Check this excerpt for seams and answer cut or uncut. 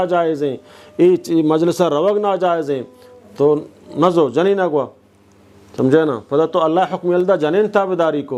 uncut